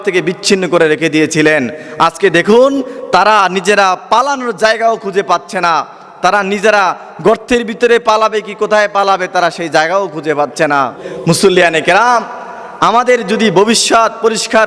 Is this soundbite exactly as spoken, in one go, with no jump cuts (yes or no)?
no